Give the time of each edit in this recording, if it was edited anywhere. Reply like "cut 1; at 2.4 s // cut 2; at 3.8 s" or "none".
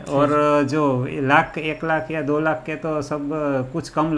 none